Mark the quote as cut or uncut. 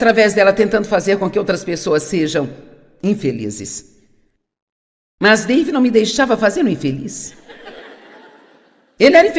uncut